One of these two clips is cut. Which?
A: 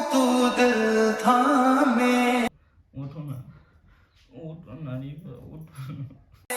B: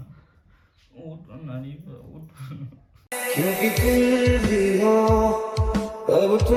A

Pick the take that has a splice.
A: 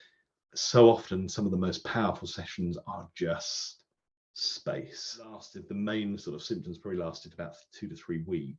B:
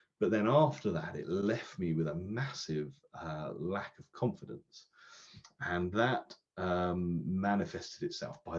A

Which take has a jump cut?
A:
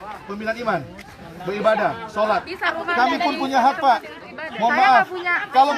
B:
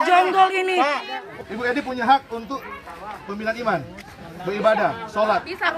B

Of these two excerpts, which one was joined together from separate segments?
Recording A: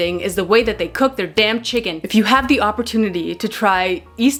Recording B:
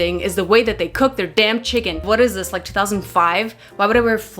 B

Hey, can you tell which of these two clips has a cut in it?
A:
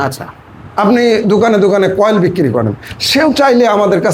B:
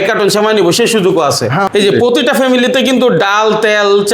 B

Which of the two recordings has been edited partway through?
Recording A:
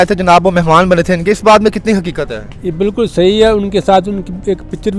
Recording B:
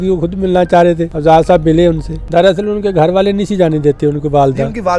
B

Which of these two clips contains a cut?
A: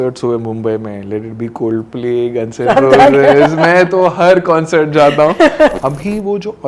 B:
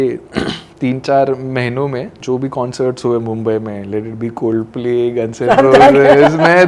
A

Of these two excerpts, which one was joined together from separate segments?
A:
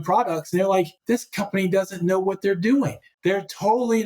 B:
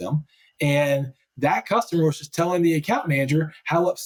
A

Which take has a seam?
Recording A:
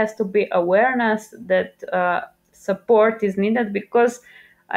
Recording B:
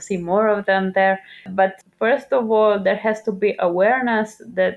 B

